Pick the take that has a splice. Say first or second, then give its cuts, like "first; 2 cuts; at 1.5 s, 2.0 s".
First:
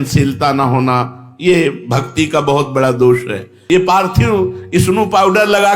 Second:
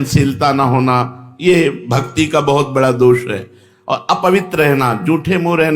first; 1 cut; at 3.5 s